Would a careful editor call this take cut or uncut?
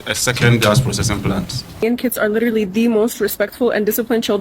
cut